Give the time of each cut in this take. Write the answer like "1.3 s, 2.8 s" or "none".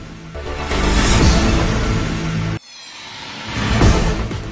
none